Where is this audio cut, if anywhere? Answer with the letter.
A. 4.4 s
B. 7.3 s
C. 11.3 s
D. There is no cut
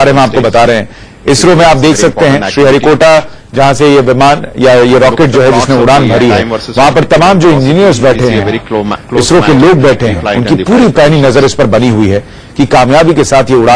C